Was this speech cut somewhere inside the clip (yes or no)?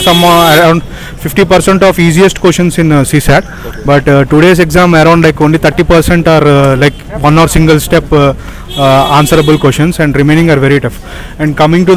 no